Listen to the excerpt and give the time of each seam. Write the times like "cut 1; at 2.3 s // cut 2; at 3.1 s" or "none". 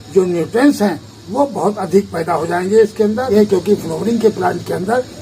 cut 1; at 3.3 s